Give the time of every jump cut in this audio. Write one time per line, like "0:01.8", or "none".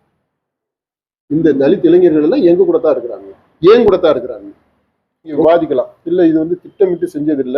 0:05.4